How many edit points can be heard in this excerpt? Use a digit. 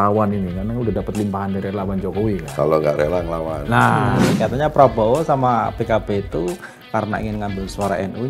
1